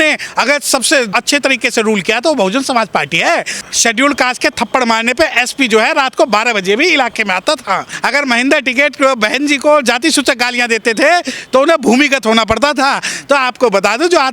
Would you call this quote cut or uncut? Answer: cut